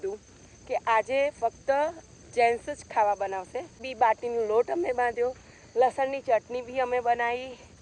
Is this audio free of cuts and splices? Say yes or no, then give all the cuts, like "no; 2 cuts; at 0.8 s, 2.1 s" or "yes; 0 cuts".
no; 1 cut; at 3.9 s